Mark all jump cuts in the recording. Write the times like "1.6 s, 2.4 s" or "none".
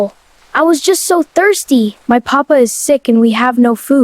2.0 s